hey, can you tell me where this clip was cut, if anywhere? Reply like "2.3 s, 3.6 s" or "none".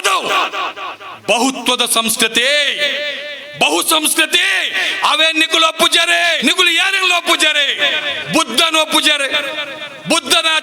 6.4 s